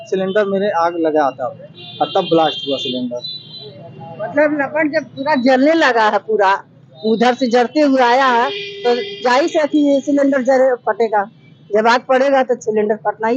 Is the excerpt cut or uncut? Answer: uncut